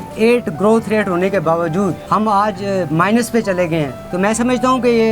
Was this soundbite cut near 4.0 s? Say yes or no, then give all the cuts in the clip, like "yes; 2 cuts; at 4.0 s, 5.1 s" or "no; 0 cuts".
yes; 2 cuts; at 2.0 s, 4.0 s